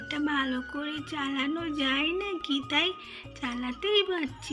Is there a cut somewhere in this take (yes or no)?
no